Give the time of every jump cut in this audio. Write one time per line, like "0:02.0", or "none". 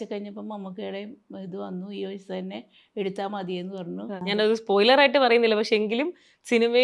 0:04.2